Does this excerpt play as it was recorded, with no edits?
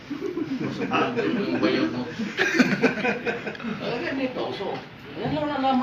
yes; 0 cuts

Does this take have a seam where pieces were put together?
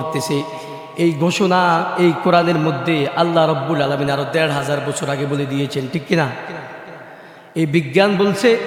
no; 0 cuts

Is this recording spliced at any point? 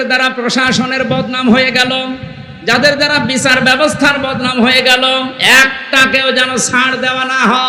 no; 0 cuts

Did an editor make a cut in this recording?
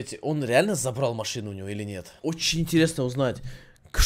yes; 1 cut; at 2.2 s

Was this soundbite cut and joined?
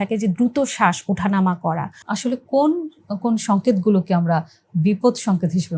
yes; 1 cut; at 2.0 s

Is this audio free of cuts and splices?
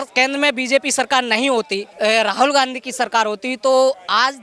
no; 1 cut; at 1.8 s

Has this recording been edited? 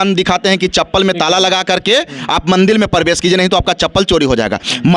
no; 0 cuts

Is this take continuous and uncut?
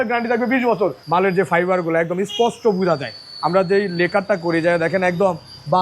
no; 1 cut; at 1.0 s

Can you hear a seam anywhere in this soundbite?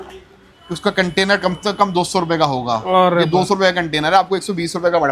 no; 0 cuts

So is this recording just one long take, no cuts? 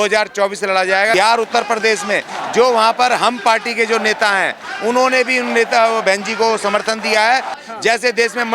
no; 2 cuts; at 1.1 s, 7.6 s

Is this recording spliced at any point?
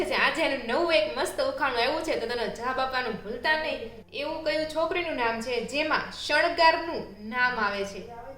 yes; 1 cut; at 4.2 s

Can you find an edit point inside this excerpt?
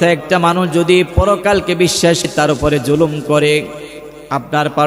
yes; 1 cut; at 2.3 s

